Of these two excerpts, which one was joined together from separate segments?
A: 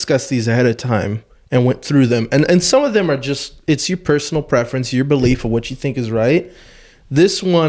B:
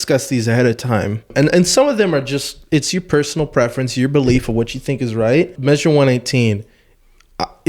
B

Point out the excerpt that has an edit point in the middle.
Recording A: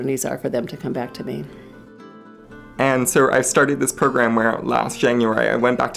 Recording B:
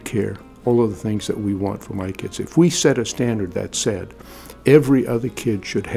A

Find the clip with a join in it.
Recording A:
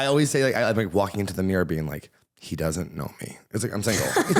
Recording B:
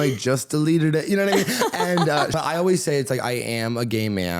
B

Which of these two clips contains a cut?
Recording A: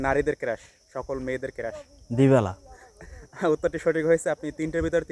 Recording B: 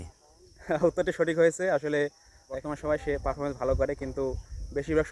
B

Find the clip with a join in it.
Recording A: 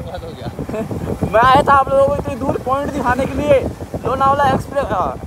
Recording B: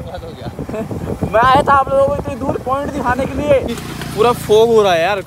B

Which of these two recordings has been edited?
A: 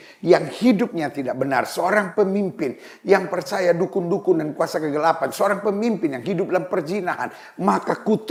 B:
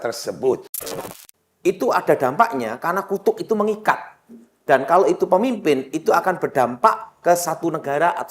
B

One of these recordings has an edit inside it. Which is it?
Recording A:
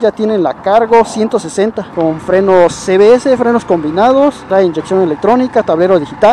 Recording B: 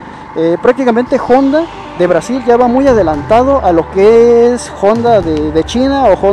A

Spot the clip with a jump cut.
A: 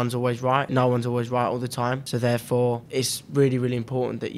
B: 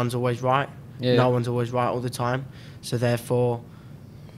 A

